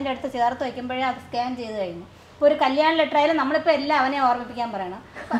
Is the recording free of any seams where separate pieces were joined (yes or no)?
yes